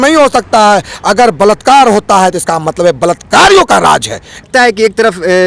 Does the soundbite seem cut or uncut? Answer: uncut